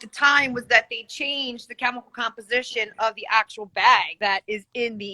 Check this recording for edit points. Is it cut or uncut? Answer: cut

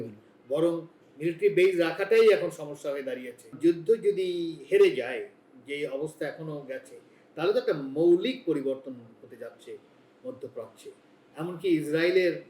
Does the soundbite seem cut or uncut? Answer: cut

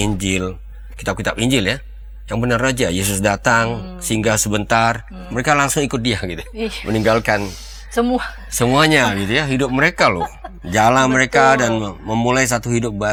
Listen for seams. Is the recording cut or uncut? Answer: uncut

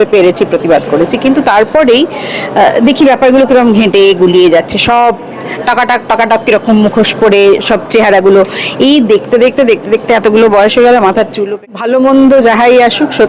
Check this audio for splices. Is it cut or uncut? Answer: cut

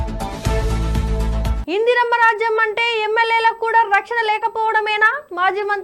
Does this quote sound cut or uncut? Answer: cut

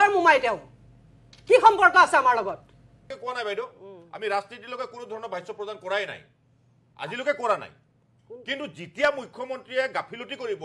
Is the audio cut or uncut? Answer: cut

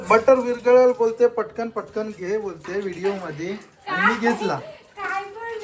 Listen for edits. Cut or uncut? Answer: uncut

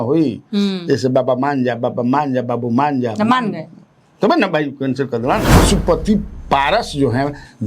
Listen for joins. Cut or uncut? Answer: cut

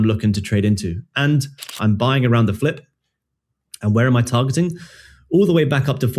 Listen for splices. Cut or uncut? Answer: cut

